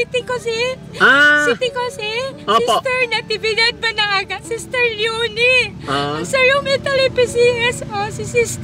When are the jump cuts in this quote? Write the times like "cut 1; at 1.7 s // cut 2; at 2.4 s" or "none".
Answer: none